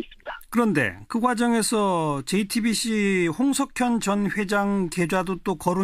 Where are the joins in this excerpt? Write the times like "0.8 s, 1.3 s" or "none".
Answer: 2.5 s